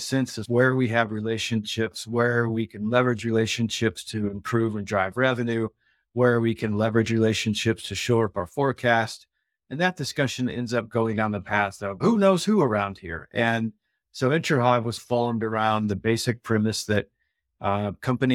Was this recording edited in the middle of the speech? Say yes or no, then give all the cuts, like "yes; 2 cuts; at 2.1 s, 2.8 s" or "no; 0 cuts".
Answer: yes; 1 cut; at 12.0 s